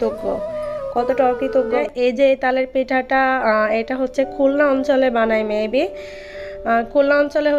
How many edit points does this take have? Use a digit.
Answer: 1